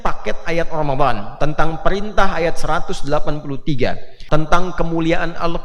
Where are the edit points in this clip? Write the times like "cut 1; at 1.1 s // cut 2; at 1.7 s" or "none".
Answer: cut 1; at 4.1 s